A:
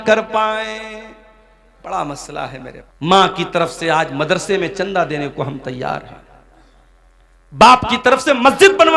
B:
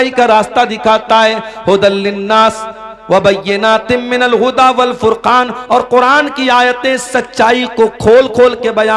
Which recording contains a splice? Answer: A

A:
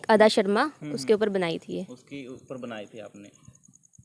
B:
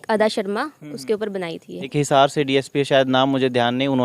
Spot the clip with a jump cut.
B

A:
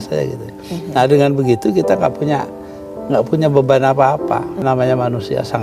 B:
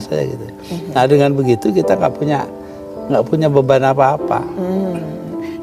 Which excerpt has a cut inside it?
A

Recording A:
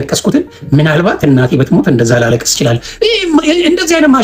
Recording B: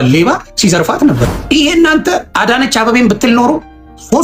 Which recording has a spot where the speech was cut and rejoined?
B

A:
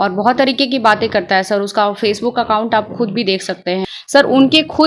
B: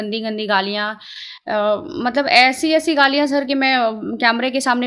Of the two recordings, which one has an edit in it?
A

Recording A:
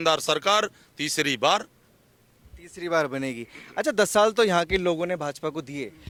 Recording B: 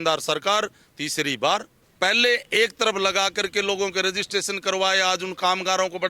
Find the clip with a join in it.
B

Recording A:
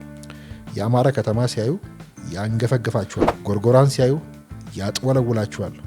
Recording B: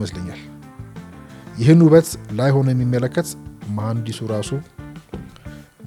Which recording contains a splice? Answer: A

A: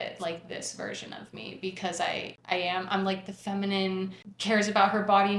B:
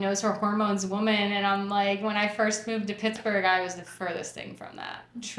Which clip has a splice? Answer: A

